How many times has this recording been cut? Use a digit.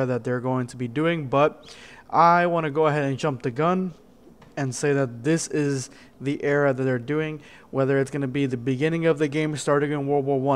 1